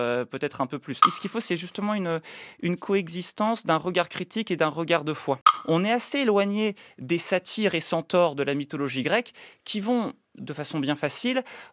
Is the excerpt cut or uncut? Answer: cut